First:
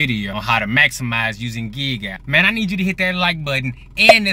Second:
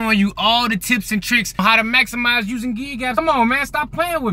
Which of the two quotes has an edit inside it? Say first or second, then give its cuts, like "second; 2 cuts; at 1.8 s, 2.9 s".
second; 1 cut; at 3.1 s